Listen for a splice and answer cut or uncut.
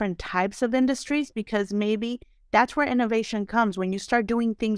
uncut